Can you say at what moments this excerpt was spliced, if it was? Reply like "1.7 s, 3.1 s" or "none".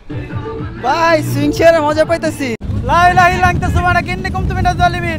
2.7 s